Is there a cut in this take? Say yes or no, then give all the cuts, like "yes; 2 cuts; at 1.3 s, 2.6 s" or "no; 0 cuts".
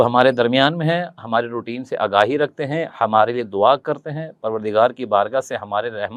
no; 0 cuts